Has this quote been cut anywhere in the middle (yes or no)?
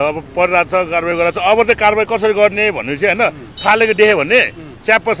no